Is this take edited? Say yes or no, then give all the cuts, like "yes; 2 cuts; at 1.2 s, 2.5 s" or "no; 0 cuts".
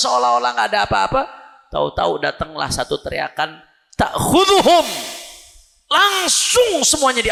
no; 0 cuts